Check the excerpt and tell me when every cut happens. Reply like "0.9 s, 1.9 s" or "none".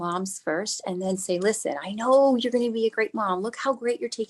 none